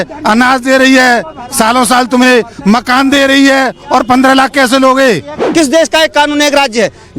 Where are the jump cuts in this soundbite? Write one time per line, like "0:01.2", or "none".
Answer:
0:05.3